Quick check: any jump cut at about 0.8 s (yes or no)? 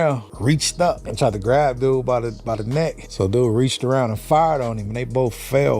yes